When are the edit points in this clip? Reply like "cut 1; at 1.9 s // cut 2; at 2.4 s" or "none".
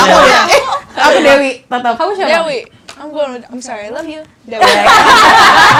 none